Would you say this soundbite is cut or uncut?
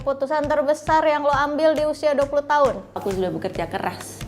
cut